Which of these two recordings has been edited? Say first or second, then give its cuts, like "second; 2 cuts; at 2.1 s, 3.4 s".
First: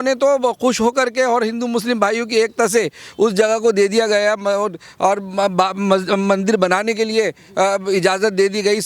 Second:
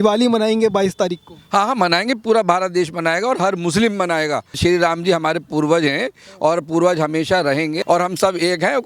second; 2 cuts; at 4.5 s, 7.8 s